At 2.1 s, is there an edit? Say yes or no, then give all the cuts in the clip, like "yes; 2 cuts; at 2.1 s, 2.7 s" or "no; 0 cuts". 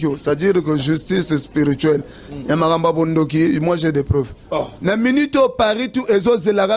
no; 1 cut; at 4.7 s